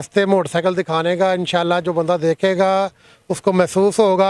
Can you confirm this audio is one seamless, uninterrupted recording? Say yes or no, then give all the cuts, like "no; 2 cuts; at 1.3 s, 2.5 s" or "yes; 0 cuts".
yes; 0 cuts